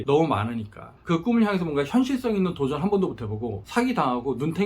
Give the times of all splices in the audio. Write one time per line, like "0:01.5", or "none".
0:01.0
0:03.6